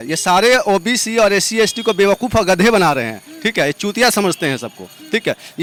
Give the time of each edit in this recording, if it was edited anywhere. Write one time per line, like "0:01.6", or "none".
none